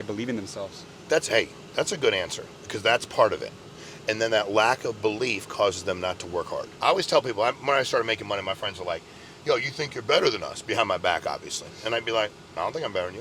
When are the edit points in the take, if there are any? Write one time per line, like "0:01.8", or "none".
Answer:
0:06.7